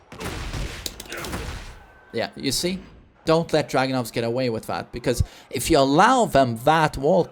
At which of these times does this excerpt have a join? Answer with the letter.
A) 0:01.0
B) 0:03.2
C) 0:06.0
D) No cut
B